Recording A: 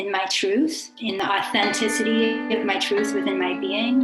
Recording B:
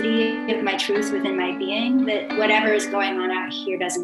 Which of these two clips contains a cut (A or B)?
A